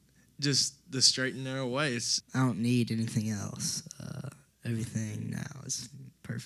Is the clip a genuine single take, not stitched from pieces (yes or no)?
no